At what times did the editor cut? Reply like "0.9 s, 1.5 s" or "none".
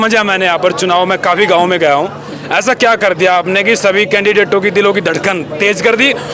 none

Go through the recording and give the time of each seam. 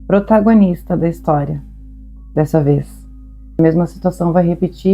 3.6 s

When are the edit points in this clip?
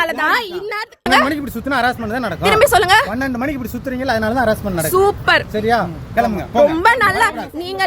1.1 s

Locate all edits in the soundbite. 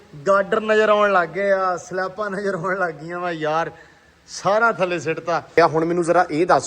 5.5 s

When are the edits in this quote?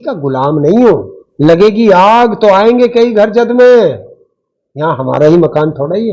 1.2 s

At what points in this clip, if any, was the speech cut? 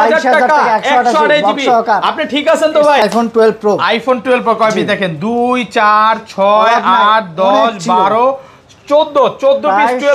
3.0 s

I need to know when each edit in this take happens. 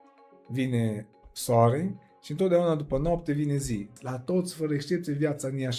4.0 s

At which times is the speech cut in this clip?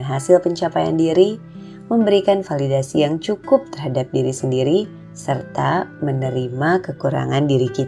none

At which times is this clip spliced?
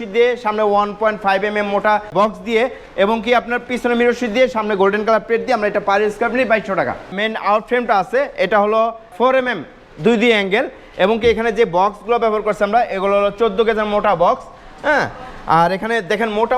2.1 s, 7.2 s, 9.1 s

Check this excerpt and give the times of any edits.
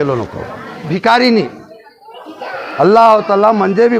0.9 s

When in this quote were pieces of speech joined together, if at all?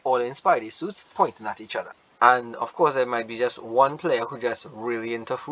2.0 s

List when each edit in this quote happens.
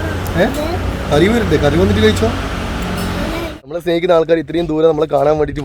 3.5 s

